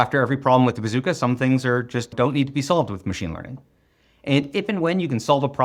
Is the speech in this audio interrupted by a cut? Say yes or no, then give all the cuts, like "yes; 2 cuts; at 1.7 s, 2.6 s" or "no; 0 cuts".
no; 0 cuts